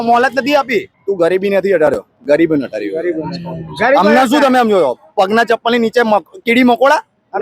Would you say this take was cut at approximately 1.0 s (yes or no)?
yes